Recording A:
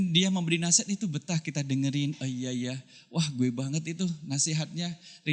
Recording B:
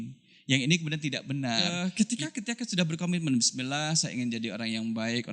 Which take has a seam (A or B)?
B